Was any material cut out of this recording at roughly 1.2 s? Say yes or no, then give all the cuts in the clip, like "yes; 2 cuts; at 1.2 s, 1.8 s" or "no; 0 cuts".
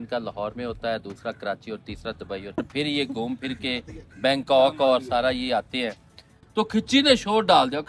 no; 2 cuts; at 2.6 s, 6.4 s